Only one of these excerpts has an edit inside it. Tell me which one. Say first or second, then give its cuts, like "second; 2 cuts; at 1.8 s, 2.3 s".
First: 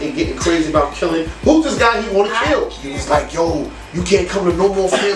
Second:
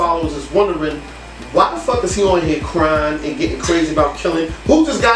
first; 1 cut; at 2.9 s